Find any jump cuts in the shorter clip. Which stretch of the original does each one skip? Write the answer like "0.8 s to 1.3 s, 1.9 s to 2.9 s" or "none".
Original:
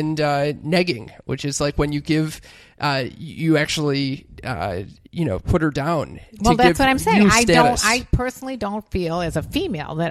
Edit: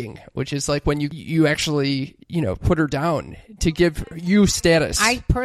2.0 s to 3.2 s, 4.3 s to 5.0 s